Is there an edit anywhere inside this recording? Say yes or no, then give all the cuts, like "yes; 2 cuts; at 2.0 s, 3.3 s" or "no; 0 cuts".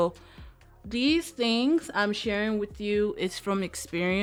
no; 0 cuts